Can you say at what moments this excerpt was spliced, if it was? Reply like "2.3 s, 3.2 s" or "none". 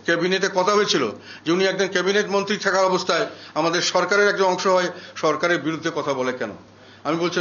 none